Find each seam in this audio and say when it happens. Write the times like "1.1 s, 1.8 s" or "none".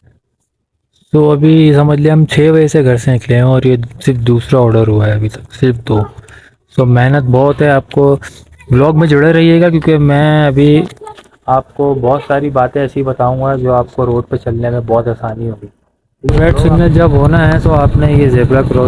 16.3 s